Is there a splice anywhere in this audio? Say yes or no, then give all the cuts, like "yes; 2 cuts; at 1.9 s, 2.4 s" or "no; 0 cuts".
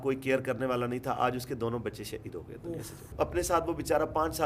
yes; 1 cut; at 3.1 s